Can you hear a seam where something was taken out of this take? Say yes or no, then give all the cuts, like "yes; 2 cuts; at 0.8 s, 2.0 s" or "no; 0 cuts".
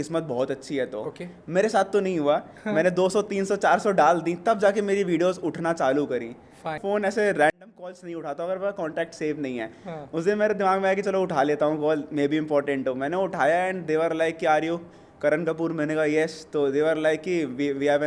yes; 1 cut; at 6.8 s